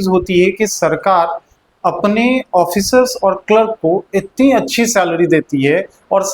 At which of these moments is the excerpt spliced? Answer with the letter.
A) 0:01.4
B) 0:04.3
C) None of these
C